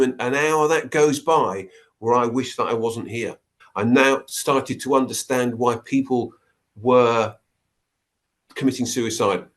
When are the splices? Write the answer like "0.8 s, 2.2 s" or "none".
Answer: 3.6 s